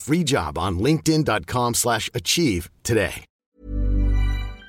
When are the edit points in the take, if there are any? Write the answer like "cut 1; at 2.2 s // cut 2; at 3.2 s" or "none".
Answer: cut 1; at 3.6 s